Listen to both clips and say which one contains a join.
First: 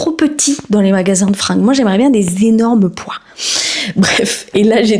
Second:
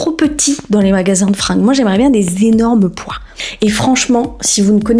second; 1 cut; at 3.4 s

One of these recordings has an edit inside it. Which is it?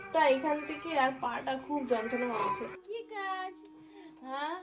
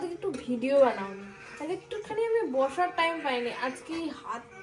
first; 1 cut; at 2.8 s

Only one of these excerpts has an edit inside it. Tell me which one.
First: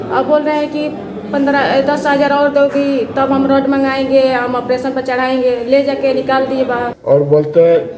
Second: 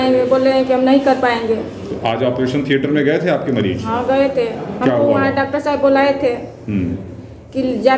first; 1 cut; at 6.9 s

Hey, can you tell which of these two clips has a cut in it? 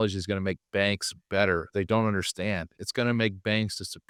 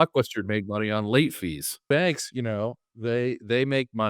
second; 1 cut; at 1.8 s

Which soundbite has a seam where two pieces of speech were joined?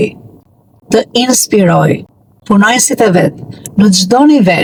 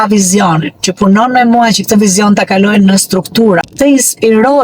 second; 1 cut; at 3.7 s

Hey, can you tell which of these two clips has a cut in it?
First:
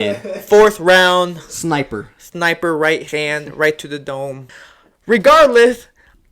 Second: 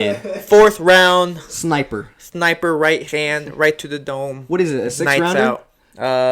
first; 1 cut; at 4.4 s

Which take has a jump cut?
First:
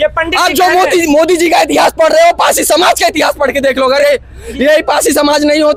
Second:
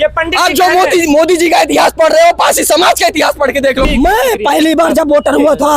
second; 1 cut; at 3.9 s

